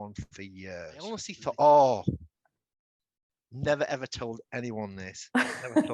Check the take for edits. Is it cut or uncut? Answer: cut